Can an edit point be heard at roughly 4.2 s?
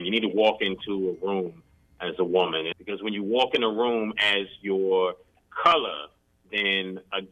no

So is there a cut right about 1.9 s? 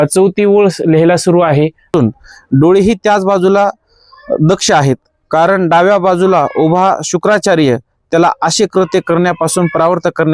yes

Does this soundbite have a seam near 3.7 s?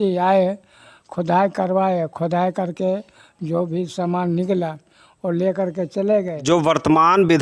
no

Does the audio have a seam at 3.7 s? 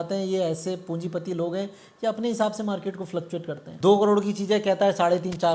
yes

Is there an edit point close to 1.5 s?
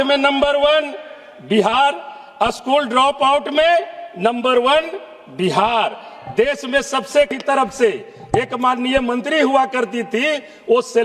no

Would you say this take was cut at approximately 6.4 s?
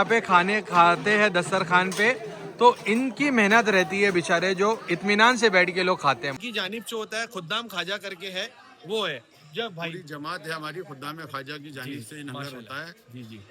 yes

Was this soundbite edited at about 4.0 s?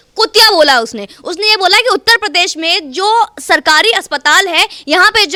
no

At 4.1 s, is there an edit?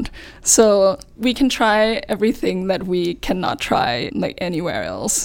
yes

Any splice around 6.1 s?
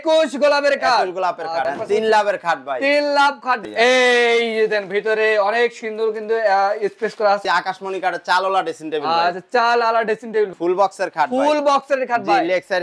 no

